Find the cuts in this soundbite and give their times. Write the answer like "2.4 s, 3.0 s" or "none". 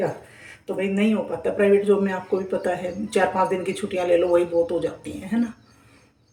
none